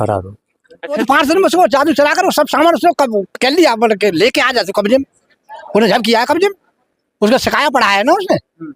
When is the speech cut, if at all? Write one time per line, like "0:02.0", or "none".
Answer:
0:01.0